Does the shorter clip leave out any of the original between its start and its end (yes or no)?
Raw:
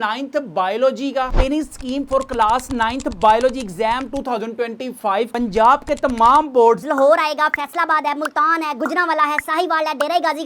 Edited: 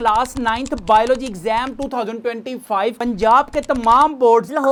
no